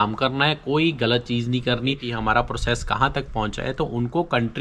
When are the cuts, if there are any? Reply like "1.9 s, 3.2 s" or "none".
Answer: 2.1 s